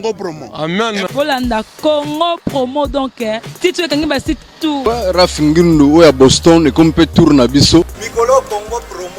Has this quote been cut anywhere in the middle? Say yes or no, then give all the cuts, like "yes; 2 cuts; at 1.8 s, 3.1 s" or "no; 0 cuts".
yes; 2 cuts; at 4.8 s, 8.0 s